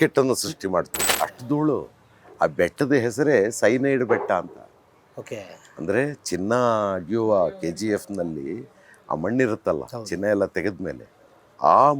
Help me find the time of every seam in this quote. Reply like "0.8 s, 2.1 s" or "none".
1.0 s